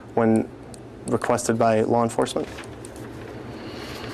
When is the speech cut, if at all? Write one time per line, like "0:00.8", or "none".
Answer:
none